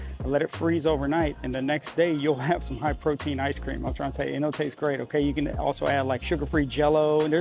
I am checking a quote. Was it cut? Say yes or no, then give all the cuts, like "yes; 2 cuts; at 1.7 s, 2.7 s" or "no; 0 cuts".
no; 0 cuts